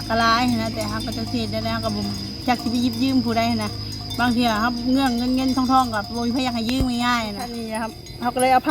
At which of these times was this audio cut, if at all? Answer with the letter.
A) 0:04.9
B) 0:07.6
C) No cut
B